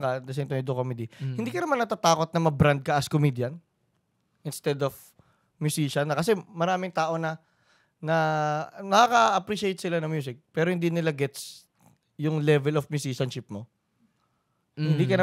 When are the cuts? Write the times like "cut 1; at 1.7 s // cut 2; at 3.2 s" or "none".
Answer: none